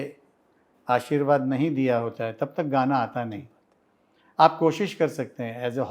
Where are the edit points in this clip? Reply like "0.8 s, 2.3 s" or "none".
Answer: none